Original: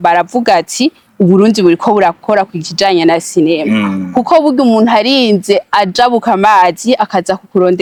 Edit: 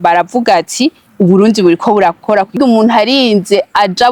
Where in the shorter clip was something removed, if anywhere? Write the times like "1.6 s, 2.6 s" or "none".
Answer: 2.6 s